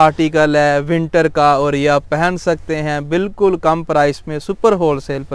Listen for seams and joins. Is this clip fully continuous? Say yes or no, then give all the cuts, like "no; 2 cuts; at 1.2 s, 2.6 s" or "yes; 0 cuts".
yes; 0 cuts